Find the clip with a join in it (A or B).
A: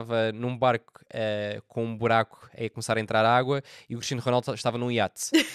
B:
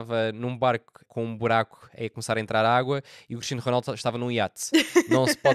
B